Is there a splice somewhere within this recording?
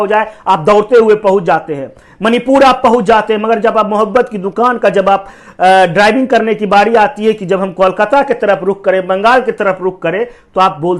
no; 0 cuts

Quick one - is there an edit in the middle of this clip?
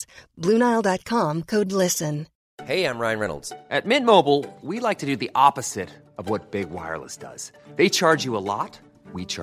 no; 0 cuts

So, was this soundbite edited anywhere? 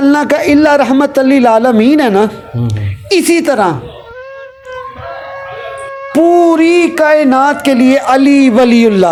no; 0 cuts

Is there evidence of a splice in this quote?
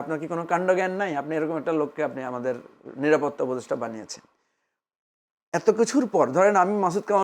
no; 0 cuts

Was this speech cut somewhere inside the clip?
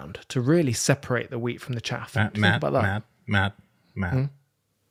no; 0 cuts

